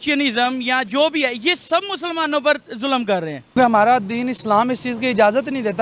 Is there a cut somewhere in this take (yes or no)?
yes